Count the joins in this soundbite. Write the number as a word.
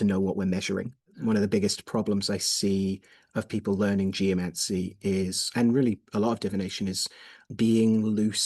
two